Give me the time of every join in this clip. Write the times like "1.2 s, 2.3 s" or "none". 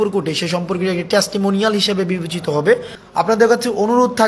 3.0 s